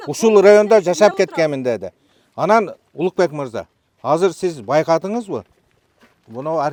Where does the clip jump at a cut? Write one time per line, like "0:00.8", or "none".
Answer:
none